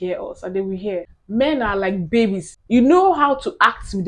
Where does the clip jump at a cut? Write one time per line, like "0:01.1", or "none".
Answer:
0:01.2
0:02.5